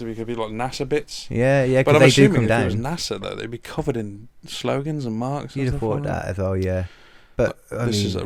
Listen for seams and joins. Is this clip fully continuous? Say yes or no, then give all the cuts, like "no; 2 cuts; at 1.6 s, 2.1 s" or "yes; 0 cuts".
yes; 0 cuts